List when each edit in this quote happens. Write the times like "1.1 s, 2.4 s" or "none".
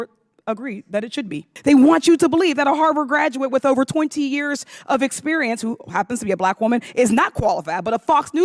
1.4 s